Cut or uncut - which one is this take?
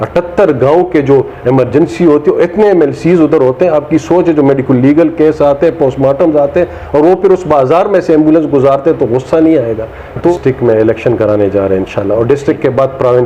cut